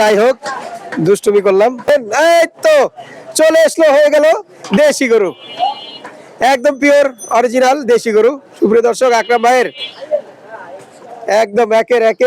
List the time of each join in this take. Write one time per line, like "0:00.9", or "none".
0:01.9

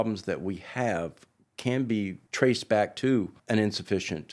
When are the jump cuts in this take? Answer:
0:02.2
0:03.4

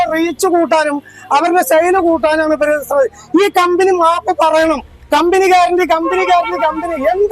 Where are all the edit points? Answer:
0:04.9

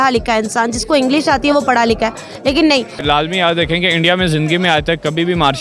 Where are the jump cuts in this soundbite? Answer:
0:03.0

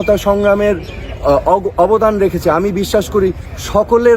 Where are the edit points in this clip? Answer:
none

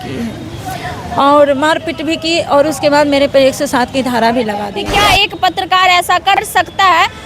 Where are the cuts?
0:04.7
0:06.5

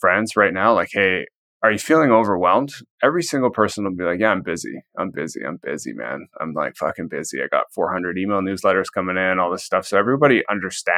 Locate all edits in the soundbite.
none

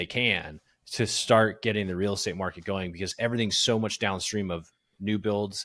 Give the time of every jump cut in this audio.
0:03.0

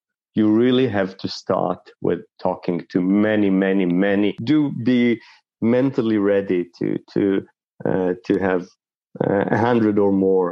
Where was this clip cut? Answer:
0:04.4

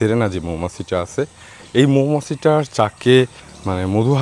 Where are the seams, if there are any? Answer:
none

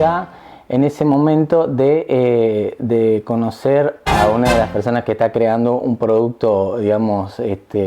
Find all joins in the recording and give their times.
0:04.0

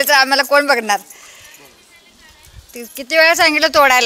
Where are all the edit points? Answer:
none

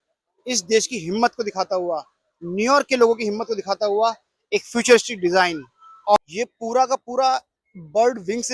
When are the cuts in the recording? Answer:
0:06.3

